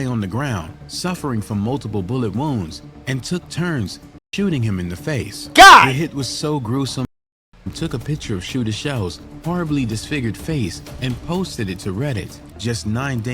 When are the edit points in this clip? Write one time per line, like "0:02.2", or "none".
0:07.0
0:12.4